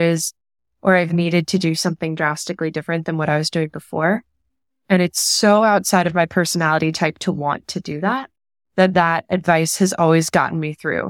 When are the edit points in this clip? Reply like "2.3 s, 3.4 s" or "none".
none